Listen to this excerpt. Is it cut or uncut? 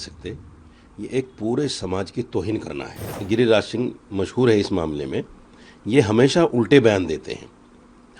cut